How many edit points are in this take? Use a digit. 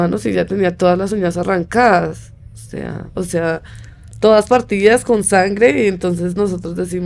0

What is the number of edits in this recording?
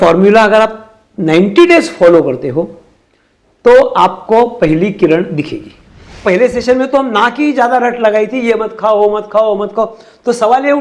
1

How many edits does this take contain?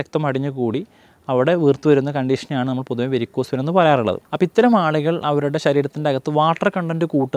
1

